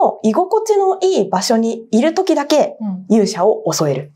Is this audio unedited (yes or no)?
yes